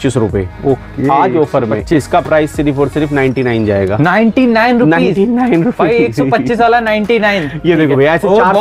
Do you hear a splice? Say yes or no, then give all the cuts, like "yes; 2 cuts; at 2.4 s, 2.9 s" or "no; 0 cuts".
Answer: no; 0 cuts